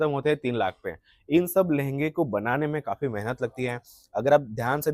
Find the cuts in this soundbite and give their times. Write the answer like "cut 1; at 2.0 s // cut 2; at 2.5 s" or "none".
none